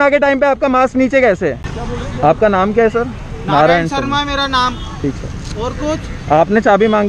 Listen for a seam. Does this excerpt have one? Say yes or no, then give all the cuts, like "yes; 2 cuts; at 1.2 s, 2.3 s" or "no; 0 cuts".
yes; 1 cut; at 1.8 s